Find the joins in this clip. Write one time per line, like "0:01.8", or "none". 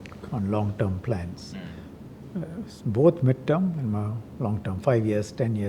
none